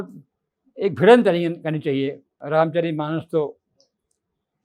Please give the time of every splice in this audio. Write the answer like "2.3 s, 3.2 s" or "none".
2.3 s